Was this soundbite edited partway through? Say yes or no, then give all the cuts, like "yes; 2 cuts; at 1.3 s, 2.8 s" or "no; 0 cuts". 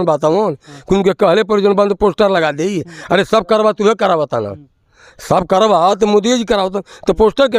no; 0 cuts